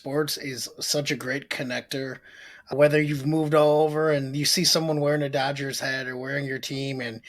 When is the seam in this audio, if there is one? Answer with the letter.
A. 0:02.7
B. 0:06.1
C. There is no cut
A